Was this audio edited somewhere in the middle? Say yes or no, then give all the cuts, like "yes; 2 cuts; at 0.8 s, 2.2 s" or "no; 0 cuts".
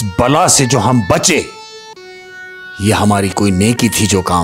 no; 0 cuts